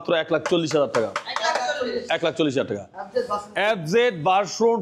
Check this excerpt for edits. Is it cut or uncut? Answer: cut